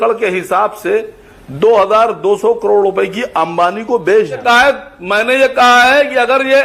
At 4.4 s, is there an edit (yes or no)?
yes